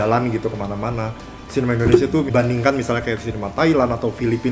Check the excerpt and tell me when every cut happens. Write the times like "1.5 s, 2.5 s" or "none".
2.3 s